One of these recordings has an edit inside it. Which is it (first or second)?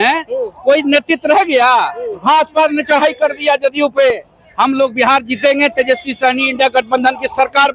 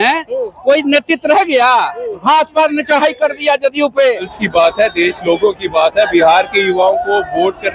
second